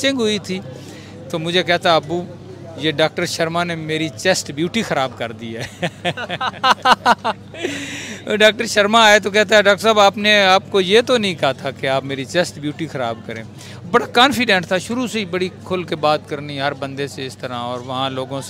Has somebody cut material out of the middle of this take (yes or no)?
no